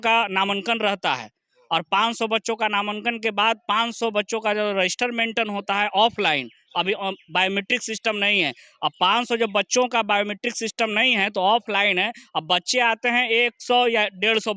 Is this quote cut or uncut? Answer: uncut